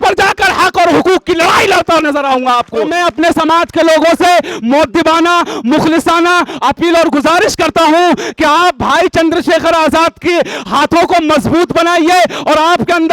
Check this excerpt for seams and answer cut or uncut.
cut